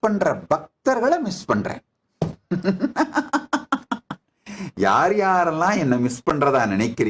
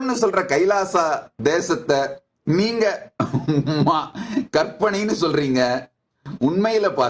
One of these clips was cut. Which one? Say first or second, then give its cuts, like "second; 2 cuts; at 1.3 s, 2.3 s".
second; 1 cut; at 1.3 s